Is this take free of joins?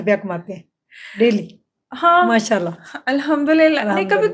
yes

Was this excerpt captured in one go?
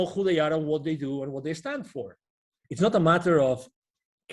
no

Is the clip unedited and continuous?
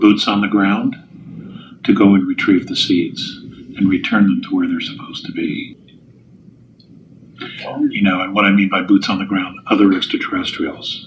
no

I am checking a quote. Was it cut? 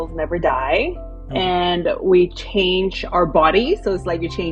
no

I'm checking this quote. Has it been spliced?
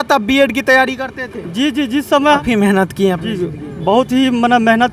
yes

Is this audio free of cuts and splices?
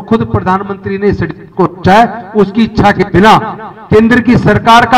yes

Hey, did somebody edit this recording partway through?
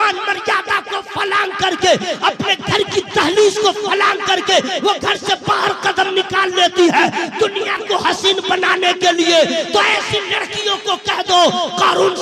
no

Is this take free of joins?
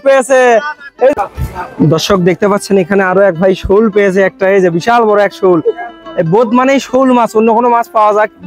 no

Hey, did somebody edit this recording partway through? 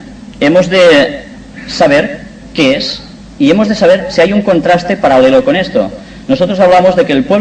no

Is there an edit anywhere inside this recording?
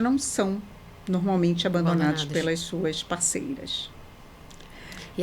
no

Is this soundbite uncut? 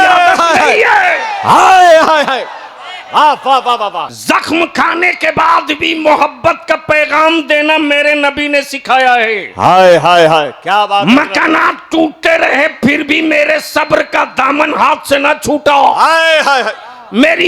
no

